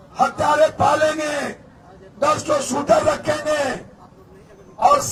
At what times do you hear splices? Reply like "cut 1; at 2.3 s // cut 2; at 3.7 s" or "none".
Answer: none